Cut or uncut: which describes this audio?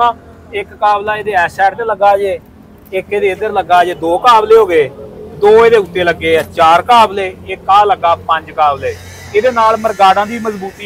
uncut